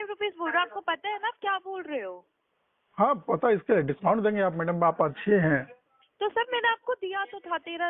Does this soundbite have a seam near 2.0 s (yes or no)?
no